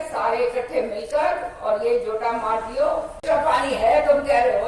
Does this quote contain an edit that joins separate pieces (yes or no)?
yes